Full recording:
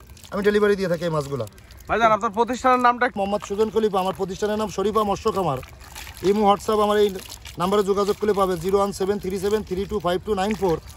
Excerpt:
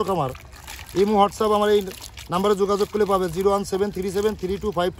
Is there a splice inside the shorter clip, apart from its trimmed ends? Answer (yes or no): no